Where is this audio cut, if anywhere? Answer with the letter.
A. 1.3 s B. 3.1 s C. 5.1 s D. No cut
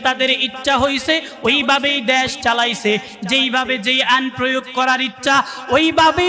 D